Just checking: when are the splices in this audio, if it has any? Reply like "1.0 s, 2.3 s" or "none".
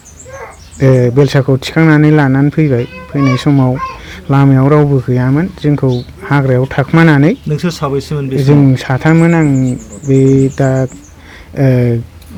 none